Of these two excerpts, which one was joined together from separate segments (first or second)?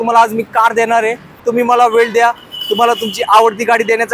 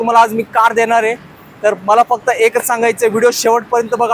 first